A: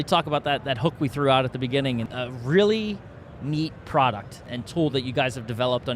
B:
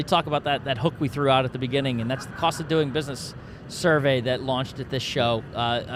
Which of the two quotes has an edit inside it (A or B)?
A